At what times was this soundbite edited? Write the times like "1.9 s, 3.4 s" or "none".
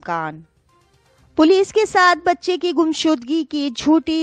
1.2 s